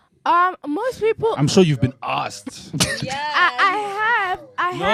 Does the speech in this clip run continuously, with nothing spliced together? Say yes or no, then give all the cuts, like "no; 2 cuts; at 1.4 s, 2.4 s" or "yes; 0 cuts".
yes; 0 cuts